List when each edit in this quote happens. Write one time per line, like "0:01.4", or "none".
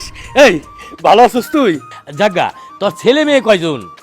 0:01.9